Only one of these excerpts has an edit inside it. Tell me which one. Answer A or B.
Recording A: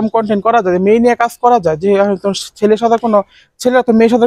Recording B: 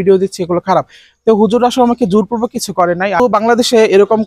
B